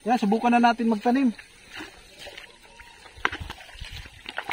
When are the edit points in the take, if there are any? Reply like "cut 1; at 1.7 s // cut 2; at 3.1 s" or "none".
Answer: none